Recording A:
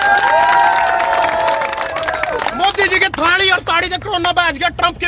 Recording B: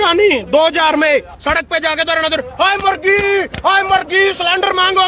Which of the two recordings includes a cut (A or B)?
B